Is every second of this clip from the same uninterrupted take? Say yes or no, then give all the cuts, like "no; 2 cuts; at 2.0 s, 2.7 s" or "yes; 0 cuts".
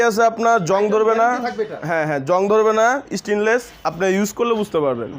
yes; 0 cuts